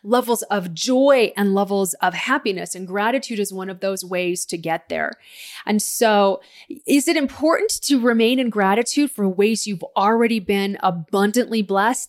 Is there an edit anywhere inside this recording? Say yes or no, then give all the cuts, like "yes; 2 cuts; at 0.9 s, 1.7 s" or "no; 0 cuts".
no; 0 cuts